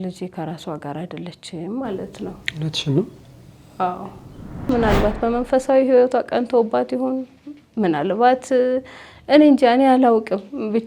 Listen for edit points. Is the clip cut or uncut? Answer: cut